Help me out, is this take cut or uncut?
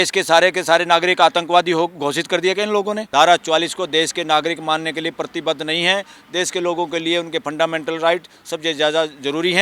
cut